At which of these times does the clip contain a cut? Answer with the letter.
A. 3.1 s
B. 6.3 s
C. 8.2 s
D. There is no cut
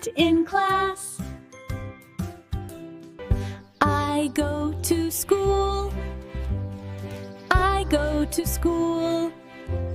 A